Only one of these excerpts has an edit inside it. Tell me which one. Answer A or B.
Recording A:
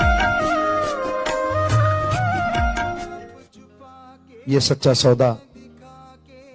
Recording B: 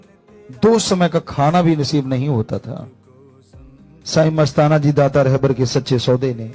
A